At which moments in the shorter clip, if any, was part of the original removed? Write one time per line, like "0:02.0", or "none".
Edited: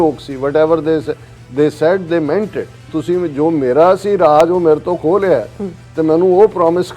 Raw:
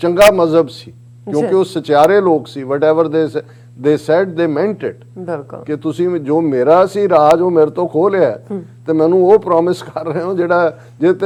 0:02.8